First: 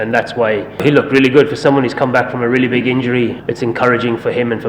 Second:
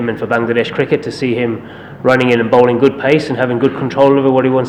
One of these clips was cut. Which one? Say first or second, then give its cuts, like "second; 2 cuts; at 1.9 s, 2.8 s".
first; 2 cuts; at 0.8 s, 3.4 s